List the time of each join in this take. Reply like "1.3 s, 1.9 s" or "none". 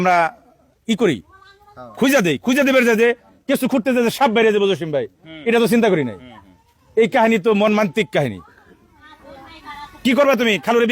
none

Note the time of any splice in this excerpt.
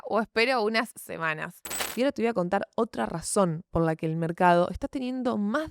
1.8 s

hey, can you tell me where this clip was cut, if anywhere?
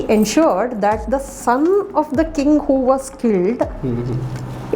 none

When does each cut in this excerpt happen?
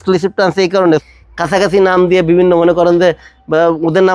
1.1 s

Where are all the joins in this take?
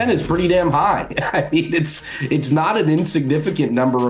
none

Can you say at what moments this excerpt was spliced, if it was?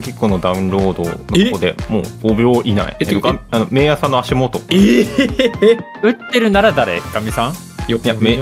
1.2 s, 2.1 s, 2.9 s, 4.6 s, 6.0 s

